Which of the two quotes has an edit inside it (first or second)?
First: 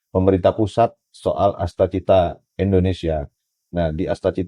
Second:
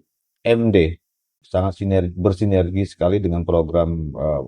second